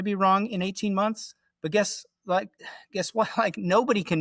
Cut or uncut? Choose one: uncut